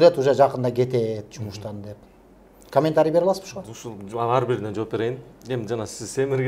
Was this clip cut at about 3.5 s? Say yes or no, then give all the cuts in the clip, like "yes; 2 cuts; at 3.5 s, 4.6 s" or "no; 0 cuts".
no; 0 cuts